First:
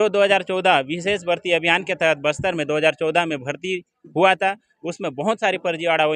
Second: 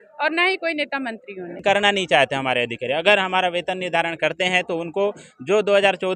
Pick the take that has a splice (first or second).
second